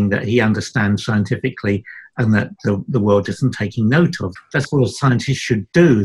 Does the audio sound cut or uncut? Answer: cut